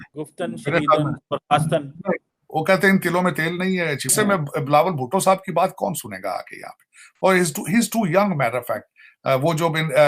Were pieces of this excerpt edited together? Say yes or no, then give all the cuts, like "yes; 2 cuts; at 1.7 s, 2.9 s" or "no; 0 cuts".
yes; 1 cut; at 4.1 s